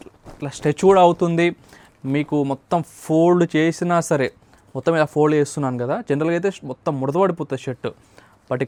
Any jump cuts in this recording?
no; 0 cuts

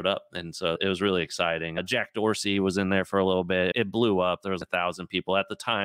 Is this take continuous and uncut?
no; 4 cuts; at 0.8 s, 1.8 s, 3.7 s, 4.6 s

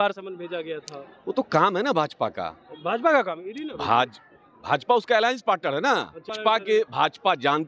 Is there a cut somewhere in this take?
yes; 1 cut; at 6.3 s

